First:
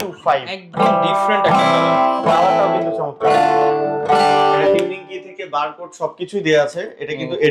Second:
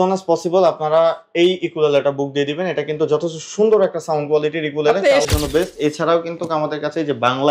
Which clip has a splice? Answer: second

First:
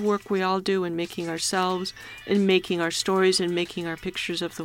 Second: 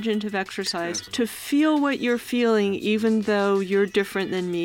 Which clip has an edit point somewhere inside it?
second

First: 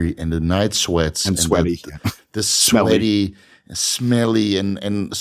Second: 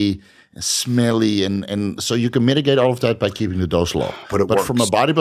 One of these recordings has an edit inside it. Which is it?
second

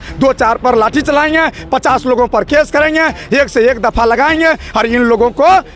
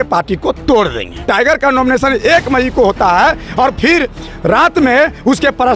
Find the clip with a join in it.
second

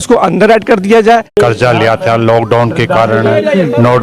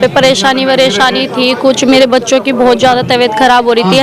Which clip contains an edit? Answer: first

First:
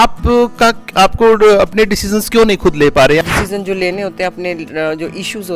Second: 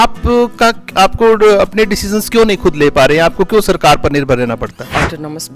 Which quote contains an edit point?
first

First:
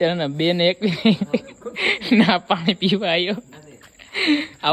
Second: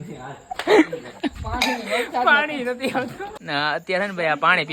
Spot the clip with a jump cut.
second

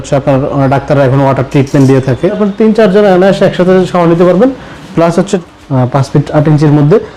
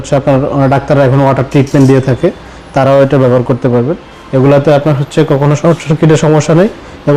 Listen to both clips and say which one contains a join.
first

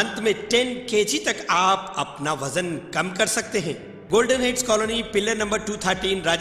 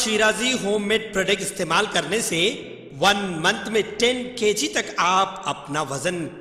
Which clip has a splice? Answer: first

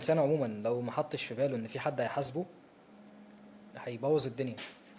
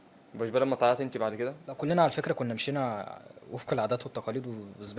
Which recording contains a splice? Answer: second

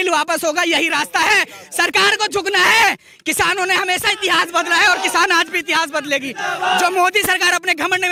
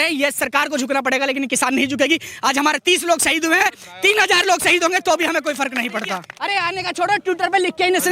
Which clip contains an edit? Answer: second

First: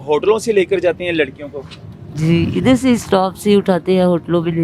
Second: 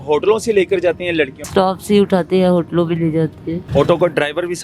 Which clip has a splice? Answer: second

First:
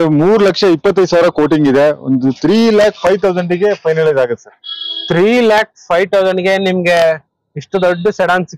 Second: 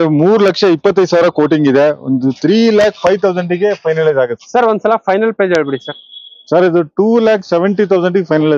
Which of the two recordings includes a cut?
second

